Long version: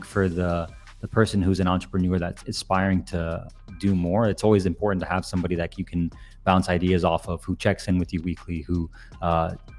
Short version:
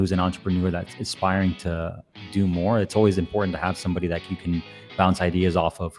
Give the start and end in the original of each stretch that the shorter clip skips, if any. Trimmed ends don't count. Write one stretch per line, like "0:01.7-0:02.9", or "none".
none